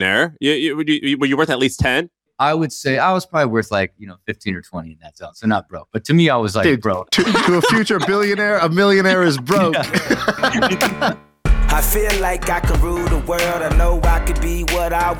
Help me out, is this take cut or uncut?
cut